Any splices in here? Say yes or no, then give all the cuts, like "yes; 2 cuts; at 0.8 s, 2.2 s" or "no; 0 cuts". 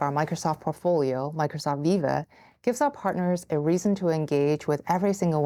no; 0 cuts